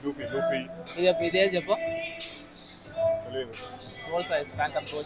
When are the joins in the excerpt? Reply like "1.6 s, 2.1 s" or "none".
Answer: none